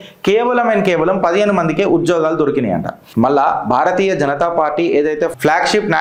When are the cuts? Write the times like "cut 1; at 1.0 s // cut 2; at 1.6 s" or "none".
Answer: none